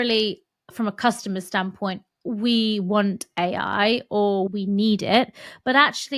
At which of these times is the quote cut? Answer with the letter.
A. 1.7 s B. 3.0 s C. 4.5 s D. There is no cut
C